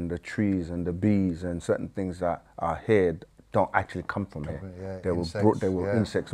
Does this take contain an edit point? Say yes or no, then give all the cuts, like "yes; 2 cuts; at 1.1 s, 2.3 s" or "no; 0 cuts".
no; 0 cuts